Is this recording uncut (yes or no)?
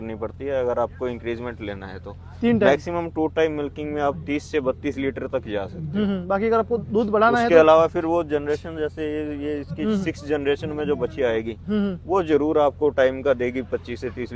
yes